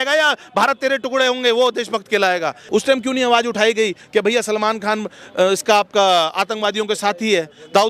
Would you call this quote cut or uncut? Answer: cut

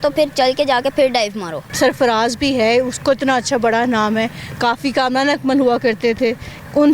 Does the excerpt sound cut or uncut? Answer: cut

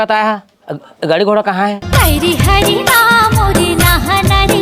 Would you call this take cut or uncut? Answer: cut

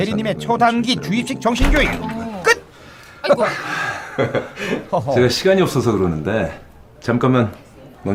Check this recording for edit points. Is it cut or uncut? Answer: uncut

